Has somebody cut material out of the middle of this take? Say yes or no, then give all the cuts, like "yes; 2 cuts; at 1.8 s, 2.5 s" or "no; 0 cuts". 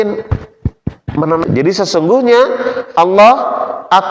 yes; 1 cut; at 1.5 s